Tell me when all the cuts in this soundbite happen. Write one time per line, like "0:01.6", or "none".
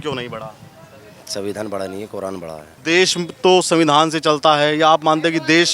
0:02.7